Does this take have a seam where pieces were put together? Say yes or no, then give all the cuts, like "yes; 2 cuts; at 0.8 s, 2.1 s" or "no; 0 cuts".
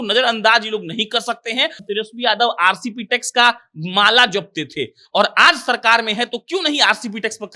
yes; 1 cut; at 1.8 s